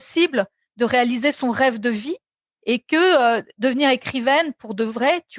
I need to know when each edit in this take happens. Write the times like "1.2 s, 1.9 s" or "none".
none